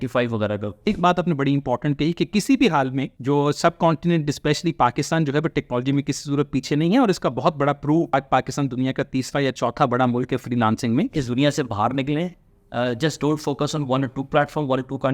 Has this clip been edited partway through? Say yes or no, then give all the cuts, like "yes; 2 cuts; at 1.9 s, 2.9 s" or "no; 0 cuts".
yes; 4 cuts; at 0.9 s, 3.1 s, 8.1 s, 11.2 s